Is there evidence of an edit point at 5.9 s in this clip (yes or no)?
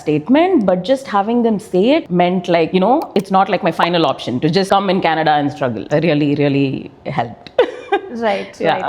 yes